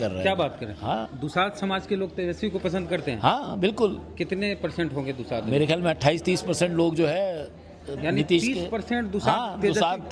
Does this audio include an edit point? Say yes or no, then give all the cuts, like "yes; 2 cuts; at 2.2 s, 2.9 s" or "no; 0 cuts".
no; 0 cuts